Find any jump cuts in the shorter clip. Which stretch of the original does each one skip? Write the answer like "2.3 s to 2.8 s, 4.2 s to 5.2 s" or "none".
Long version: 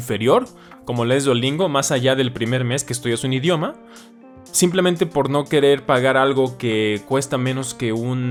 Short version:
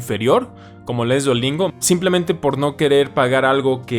1.7 s to 4.4 s